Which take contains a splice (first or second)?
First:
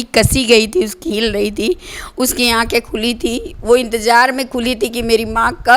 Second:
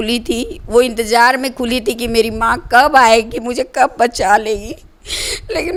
first